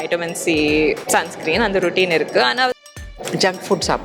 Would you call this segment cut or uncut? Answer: cut